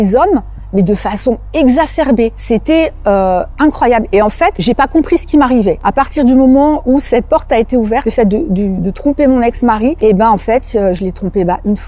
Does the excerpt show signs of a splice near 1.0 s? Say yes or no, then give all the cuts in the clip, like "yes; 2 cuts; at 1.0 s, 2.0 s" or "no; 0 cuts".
no; 5 cuts; at 2.4 s, 4.6 s, 5.8 s, 8.1 s, 10.0 s